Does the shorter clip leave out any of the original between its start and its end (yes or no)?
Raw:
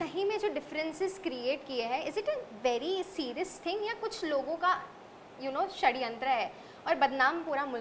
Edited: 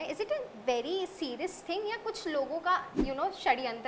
yes